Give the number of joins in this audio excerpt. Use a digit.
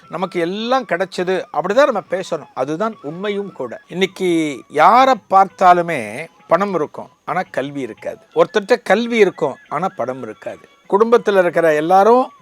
5